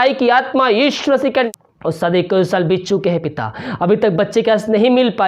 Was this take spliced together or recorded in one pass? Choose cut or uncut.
cut